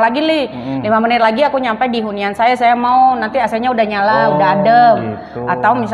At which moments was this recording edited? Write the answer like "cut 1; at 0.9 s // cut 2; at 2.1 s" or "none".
none